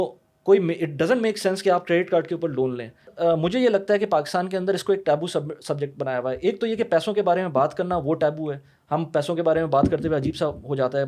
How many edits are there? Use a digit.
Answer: 1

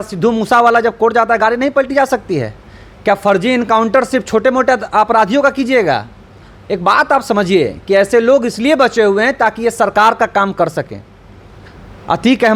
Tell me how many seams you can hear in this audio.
0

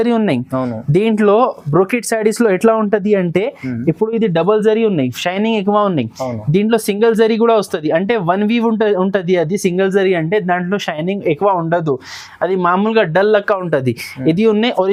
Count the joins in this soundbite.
0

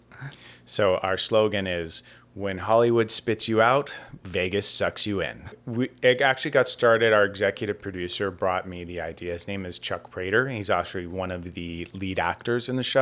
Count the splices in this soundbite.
1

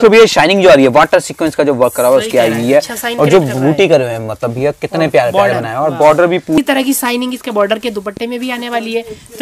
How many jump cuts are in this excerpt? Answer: 1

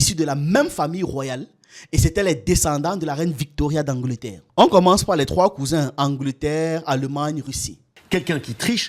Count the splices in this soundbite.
1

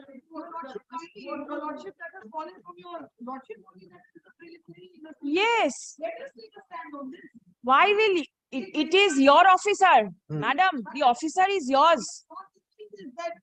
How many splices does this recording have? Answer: 0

